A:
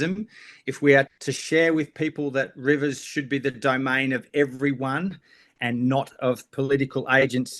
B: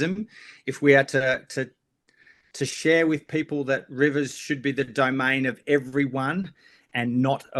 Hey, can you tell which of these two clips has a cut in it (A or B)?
A